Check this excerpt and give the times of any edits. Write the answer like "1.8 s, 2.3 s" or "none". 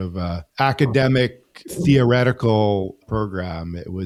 none